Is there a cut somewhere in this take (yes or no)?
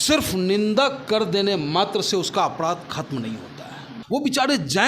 yes